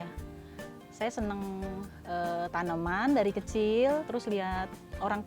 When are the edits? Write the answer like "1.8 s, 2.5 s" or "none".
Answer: 4.1 s